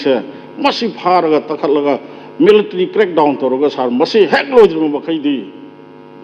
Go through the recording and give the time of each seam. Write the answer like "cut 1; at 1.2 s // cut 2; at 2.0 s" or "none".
none